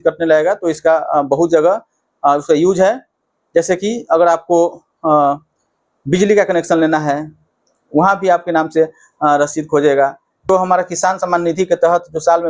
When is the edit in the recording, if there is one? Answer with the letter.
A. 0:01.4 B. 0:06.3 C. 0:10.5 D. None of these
C